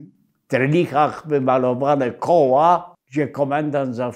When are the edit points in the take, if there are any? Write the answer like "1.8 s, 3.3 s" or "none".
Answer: 3.0 s